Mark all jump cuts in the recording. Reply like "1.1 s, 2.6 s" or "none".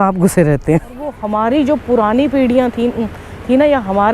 1.2 s